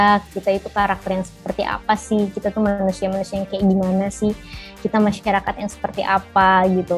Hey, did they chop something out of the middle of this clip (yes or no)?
no